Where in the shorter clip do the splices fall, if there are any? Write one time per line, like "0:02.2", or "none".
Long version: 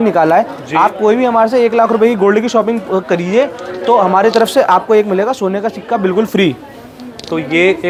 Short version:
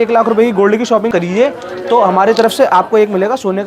0:01.1